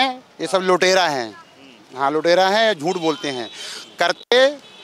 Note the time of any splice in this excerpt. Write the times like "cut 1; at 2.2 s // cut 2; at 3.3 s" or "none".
none